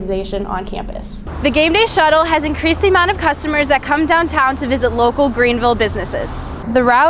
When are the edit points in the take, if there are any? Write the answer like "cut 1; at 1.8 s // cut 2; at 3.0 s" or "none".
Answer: cut 1; at 1.2 s